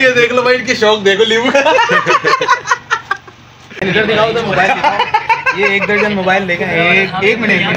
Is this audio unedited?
no; 1 cut; at 3.8 s

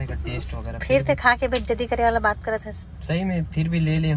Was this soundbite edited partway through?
no; 0 cuts

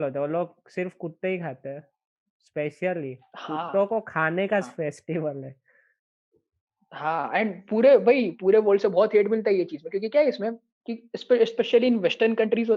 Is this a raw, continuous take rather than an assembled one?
yes; 0 cuts

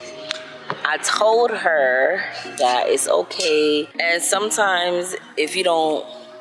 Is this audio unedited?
yes; 0 cuts

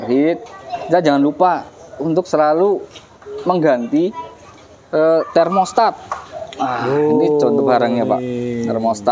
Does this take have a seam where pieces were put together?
no; 0 cuts

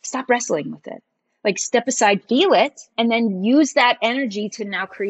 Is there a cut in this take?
yes; 1 cut; at 2.9 s

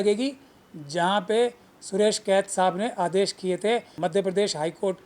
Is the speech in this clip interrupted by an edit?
yes; 1 cut; at 4.0 s

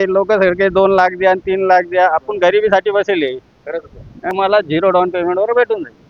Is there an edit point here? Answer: yes; 1 cut; at 4.3 s

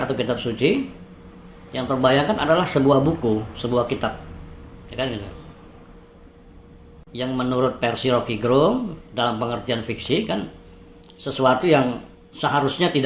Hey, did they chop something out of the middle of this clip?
no; 0 cuts

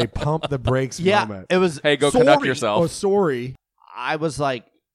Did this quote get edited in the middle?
yes; 1 cut; at 3.5 s

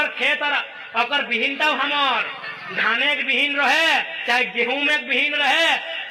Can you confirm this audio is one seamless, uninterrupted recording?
yes; 0 cuts

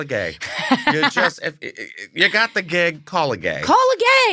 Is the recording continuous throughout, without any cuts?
yes; 0 cuts

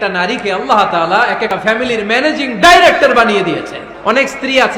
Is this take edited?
yes; 2 cuts; at 1.5 s, 3.8 s

